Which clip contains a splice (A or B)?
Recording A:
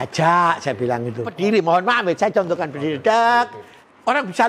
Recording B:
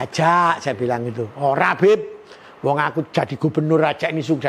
A